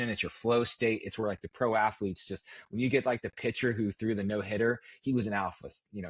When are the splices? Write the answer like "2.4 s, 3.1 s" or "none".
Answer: none

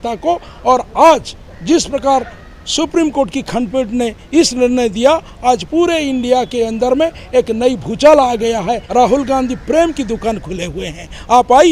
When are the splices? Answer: 8.8 s

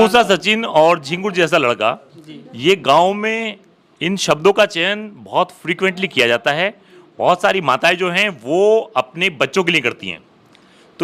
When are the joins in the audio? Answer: none

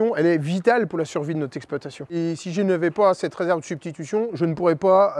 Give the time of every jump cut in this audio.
2.0 s

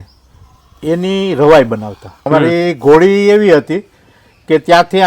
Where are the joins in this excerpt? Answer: 2.3 s

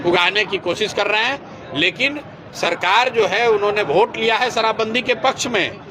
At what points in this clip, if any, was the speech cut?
none

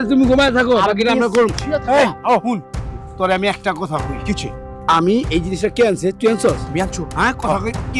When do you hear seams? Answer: none

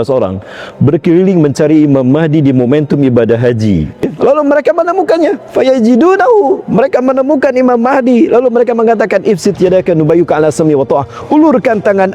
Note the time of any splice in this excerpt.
4.0 s

